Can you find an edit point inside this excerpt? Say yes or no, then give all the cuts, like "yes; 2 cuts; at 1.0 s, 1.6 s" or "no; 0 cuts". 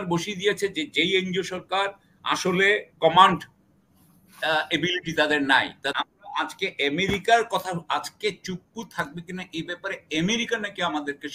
yes; 1 cut; at 5.9 s